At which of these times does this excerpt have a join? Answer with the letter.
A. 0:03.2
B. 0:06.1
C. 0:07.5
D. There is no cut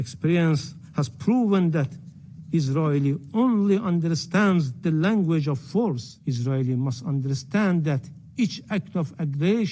B